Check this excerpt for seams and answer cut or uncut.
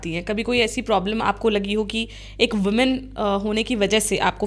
uncut